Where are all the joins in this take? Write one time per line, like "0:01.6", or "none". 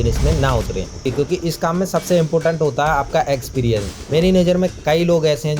0:01.0
0:03.9